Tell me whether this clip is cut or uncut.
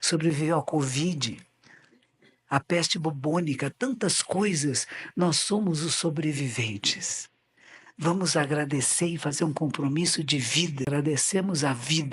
cut